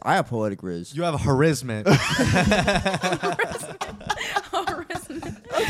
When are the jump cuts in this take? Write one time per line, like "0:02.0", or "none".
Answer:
none

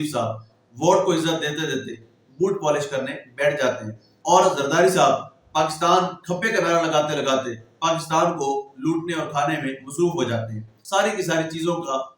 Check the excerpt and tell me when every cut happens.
0:10.8

